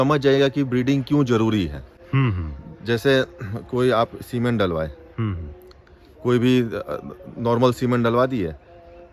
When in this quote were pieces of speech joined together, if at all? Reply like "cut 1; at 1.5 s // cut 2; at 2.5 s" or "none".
none